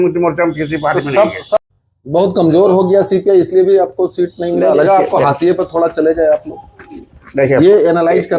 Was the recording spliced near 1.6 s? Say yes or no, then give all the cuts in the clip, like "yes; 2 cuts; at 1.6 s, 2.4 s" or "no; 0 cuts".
yes; 1 cut; at 1.6 s